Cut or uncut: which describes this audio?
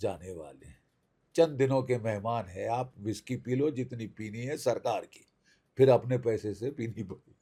uncut